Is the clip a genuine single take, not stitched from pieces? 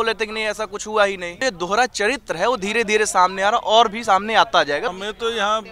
no; 2 cuts; at 1.4 s, 4.9 s

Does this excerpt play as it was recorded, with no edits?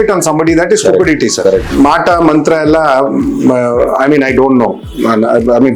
no; 1 cut; at 1.7 s

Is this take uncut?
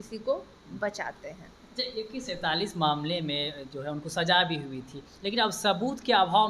yes; 0 cuts

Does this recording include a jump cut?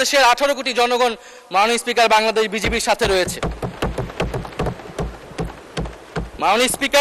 no; 0 cuts

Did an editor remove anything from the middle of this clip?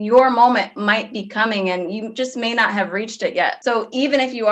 yes; 1 cut; at 3.6 s

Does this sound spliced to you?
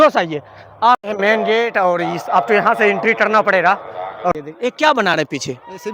yes; 2 cuts; at 1.0 s, 4.4 s

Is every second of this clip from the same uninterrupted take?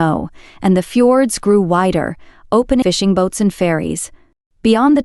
no; 1 cut; at 2.8 s

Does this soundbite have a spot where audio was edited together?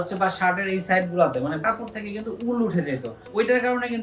no; 0 cuts

